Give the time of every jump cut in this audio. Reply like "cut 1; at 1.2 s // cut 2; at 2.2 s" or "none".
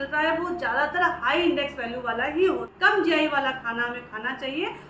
cut 1; at 2.7 s